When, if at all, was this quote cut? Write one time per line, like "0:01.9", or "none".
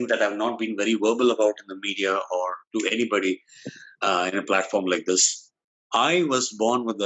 none